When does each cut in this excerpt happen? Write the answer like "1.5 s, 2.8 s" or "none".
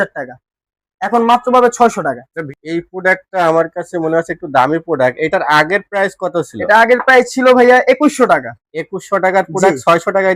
2.4 s